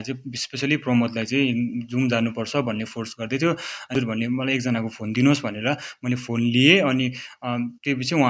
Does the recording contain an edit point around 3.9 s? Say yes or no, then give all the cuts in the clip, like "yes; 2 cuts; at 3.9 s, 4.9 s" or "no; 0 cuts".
yes; 1 cut; at 3.9 s